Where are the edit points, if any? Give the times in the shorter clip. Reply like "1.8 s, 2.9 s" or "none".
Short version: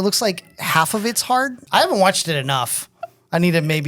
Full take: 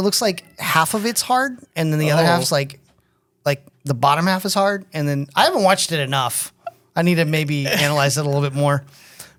1.6 s